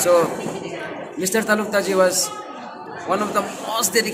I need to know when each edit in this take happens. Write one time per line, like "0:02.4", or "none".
none

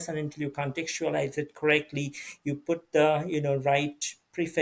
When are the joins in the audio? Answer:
none

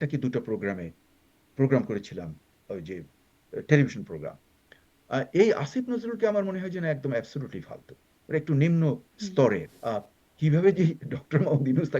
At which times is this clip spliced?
0:09.7

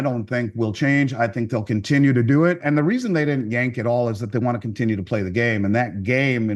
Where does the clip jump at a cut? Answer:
0:02.6

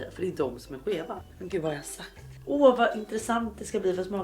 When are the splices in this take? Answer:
0:01.3
0:02.3

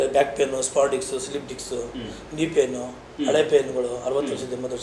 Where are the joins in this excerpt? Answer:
none

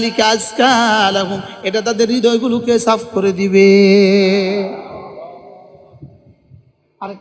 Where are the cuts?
none

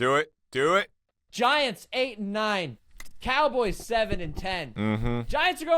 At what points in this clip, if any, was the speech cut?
0:04.7

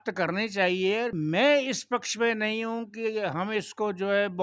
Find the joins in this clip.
0:01.1

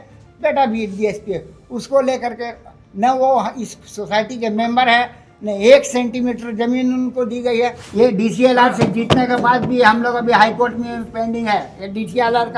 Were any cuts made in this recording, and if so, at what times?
0:07.8

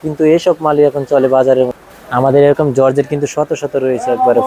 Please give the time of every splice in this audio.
0:01.8

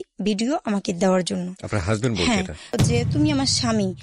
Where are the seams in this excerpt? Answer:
0:02.7

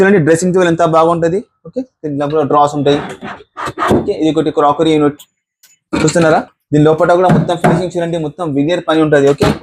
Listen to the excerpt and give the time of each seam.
none

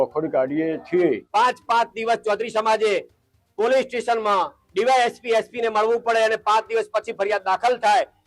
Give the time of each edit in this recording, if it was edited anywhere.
0:01.2

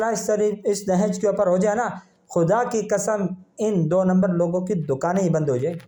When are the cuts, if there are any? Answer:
none

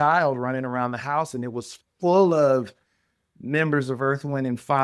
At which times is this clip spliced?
none

